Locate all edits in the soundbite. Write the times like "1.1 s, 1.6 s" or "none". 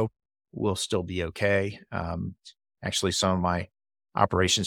none